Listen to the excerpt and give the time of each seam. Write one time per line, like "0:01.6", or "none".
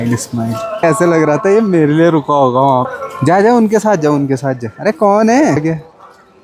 0:00.8
0:03.0
0:05.6